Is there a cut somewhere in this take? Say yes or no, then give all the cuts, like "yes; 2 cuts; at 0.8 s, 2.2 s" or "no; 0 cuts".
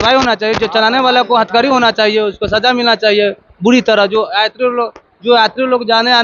no; 0 cuts